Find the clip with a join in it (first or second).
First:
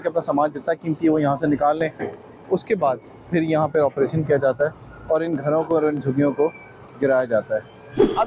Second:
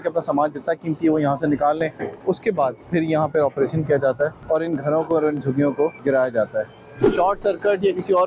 second